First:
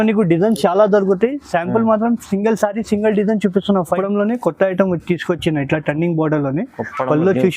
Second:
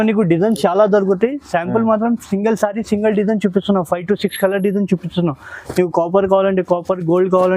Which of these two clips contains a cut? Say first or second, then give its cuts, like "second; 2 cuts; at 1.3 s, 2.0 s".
first; 1 cut; at 4.0 s